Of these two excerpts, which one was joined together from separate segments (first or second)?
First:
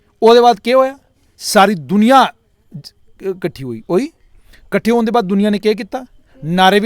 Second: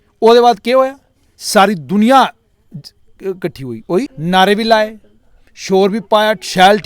second